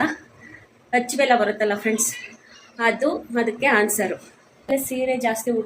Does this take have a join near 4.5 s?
yes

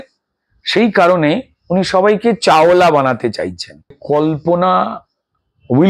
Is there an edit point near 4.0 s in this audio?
yes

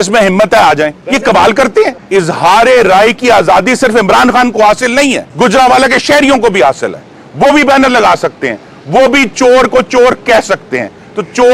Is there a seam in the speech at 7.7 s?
no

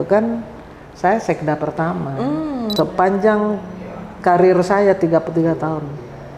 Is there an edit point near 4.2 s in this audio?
no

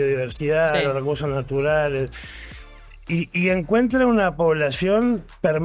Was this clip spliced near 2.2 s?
no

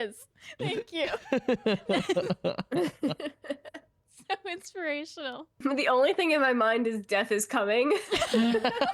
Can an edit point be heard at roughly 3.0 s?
no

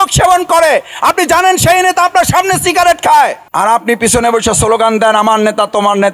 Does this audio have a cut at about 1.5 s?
no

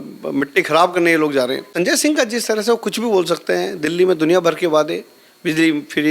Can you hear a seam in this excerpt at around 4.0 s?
no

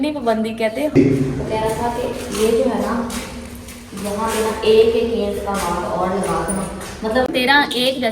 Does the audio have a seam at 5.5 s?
no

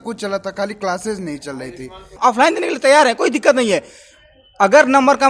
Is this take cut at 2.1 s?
yes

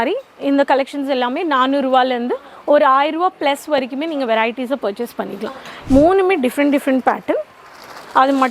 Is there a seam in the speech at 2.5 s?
no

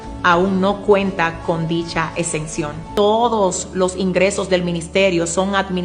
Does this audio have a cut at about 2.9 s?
yes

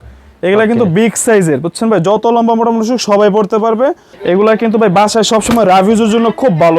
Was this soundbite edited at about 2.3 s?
no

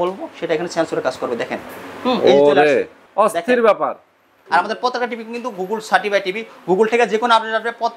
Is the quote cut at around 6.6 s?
no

